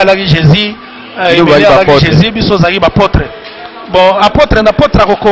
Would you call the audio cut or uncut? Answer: uncut